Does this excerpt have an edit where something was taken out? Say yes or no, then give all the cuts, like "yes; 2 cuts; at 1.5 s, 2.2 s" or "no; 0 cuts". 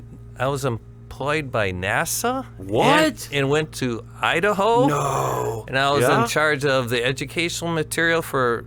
no; 0 cuts